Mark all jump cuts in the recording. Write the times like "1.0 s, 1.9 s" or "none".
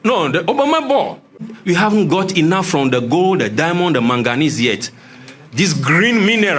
1.5 s